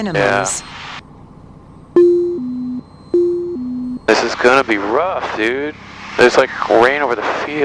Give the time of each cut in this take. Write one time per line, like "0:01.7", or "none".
0:04.0